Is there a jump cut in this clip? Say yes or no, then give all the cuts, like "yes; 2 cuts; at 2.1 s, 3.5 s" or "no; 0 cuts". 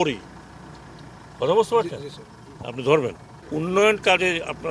yes; 1 cut; at 3.4 s